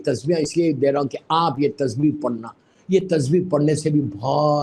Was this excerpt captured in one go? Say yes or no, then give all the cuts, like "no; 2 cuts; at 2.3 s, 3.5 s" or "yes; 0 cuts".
yes; 0 cuts